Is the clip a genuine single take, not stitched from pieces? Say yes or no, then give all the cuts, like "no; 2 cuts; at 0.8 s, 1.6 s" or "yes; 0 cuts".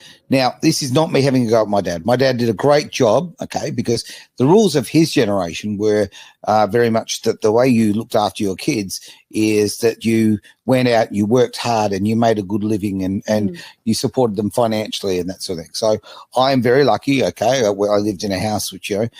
yes; 0 cuts